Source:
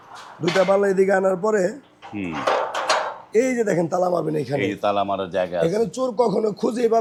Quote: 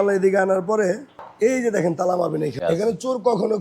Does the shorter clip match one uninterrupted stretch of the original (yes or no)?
no